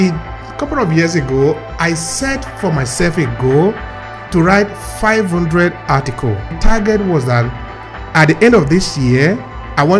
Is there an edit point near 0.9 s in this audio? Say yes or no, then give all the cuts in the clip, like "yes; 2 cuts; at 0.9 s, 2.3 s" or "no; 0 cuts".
no; 1 cut; at 6.5 s